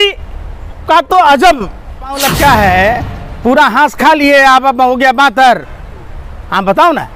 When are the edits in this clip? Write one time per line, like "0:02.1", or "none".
0:02.3